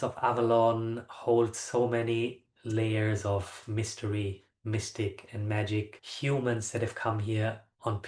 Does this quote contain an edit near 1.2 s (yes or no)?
no